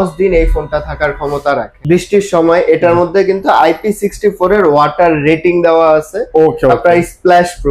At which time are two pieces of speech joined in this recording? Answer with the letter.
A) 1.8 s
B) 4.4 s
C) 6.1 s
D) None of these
A